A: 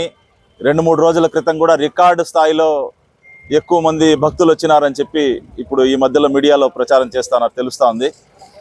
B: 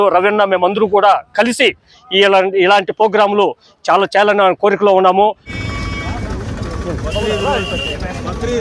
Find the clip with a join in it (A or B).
B